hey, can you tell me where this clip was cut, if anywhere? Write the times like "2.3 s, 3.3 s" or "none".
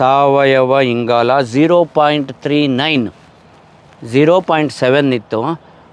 none